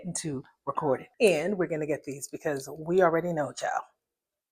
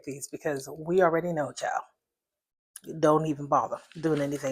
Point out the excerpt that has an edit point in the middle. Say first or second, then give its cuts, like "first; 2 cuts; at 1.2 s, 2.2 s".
first; 1 cut; at 1.1 s